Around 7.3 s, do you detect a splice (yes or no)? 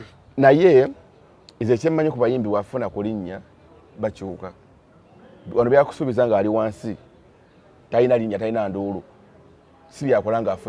no